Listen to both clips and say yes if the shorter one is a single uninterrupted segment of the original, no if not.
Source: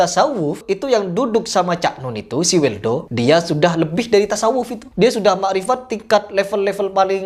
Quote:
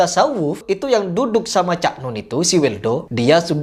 yes